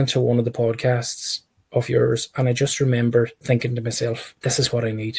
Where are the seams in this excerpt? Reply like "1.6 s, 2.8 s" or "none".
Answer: 4.3 s